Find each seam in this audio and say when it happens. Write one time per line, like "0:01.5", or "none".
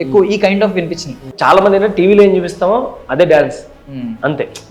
0:01.3